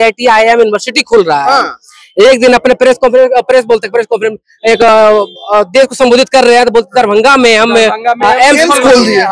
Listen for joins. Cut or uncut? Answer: uncut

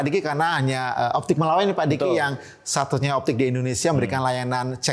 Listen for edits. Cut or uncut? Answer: uncut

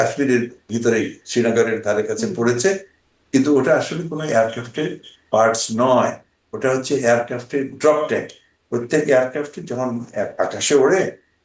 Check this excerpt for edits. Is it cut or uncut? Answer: uncut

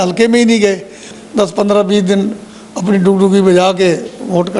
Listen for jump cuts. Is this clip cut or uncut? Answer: cut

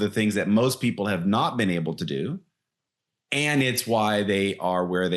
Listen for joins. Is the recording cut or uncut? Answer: uncut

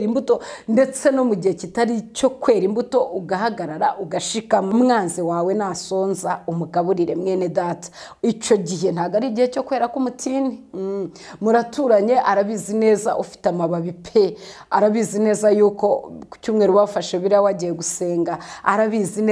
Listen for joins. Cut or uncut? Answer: cut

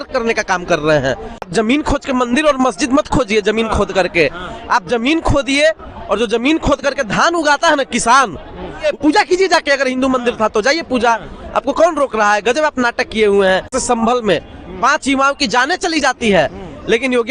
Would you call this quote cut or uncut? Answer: cut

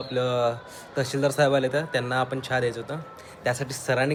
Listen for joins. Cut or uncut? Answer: uncut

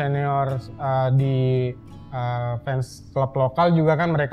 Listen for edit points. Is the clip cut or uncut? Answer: uncut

